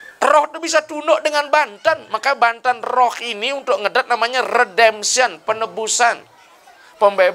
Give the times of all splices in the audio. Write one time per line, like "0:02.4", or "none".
none